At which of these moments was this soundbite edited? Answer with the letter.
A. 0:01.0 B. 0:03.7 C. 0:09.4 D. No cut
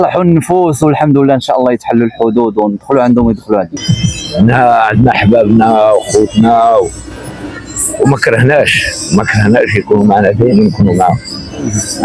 B